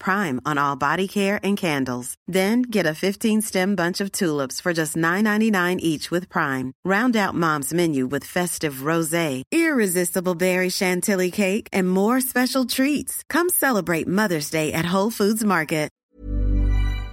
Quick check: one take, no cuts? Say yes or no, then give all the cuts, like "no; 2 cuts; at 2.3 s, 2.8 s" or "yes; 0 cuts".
no; 1 cut; at 15.9 s